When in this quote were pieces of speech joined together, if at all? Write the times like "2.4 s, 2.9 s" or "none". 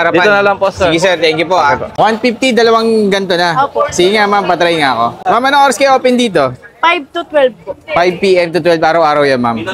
1.9 s